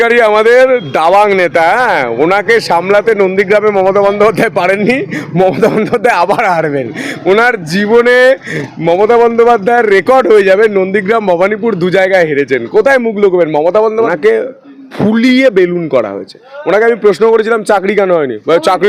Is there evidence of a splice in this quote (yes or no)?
yes